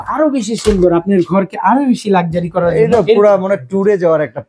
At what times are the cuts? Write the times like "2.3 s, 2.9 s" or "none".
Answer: none